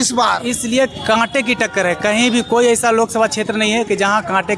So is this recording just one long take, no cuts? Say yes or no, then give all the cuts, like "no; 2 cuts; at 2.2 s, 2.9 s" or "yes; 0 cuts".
yes; 0 cuts